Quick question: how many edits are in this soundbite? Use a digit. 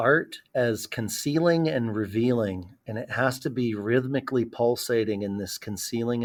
0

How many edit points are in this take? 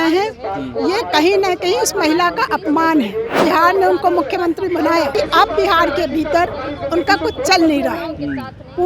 2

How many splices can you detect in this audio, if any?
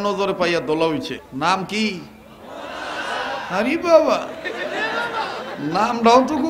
1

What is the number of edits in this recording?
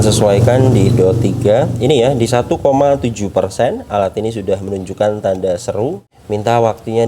1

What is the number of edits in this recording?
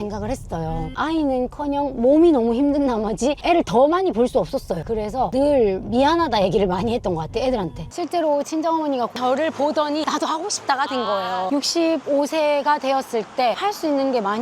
5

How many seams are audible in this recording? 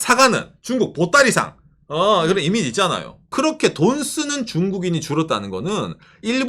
1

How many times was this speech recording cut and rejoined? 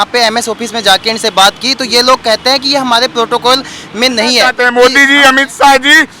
1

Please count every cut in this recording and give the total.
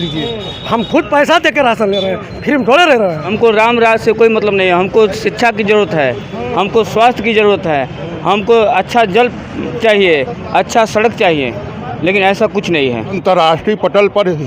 2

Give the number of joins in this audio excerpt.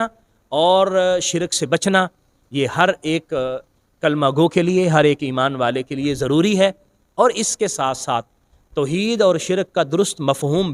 0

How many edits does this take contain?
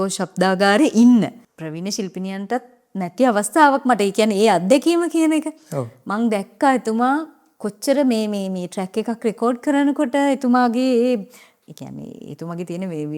2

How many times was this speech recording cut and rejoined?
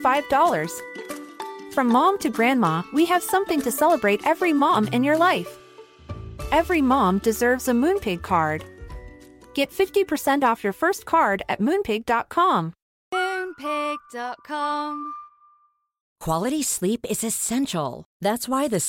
1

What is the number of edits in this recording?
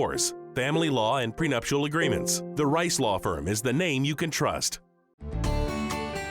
1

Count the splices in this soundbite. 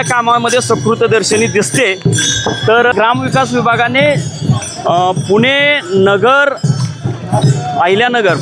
1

